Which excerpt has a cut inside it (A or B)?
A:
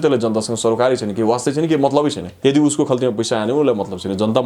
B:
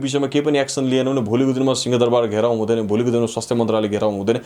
A